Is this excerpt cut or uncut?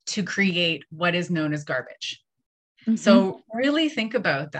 uncut